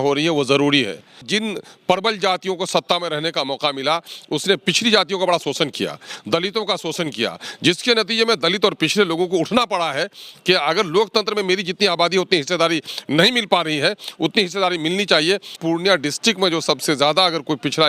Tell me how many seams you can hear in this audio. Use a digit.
2